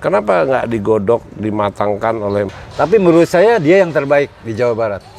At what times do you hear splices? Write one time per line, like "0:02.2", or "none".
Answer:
0:02.5